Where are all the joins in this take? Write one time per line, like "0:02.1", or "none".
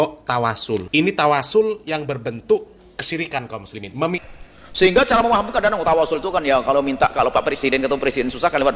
0:04.2